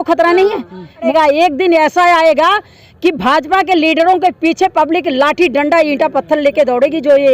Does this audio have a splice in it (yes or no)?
yes